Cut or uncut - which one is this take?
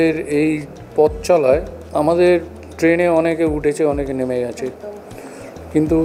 cut